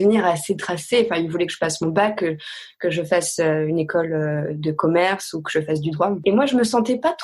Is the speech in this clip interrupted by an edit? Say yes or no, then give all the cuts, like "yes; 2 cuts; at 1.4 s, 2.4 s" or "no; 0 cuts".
yes; 1 cut; at 6.2 s